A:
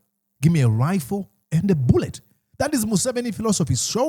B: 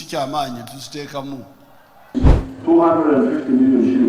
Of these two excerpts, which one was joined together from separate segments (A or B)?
B